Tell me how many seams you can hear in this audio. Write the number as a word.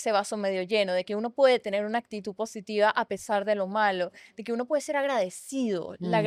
zero